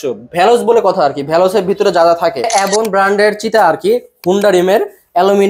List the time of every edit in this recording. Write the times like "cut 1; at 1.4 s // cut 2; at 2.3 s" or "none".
cut 1; at 2.5 s